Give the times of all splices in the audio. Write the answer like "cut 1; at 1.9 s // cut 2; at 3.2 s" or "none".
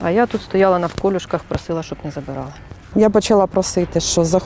cut 1; at 2.8 s